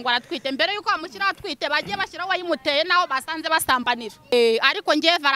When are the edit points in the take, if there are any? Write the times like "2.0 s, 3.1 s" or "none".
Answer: 4.3 s